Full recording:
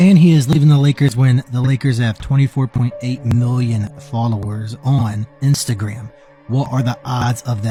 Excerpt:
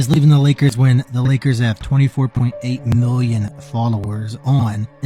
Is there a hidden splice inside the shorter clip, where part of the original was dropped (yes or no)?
no